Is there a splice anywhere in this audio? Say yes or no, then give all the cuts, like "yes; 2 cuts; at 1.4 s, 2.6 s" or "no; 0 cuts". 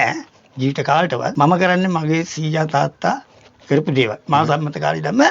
no; 0 cuts